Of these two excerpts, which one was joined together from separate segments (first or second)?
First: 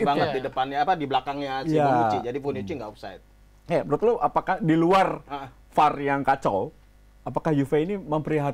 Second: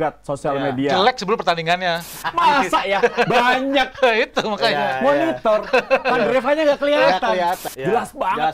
second